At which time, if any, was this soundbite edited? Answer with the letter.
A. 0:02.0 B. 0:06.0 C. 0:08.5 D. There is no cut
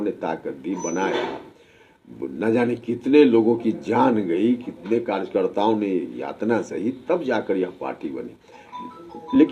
D